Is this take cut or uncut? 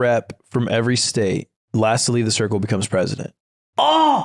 cut